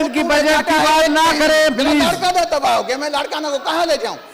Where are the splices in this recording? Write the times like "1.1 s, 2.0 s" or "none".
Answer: none